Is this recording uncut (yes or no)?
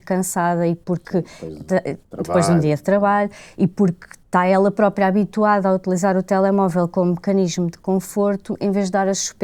yes